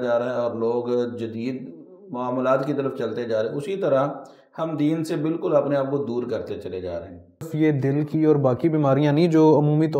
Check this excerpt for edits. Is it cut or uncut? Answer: cut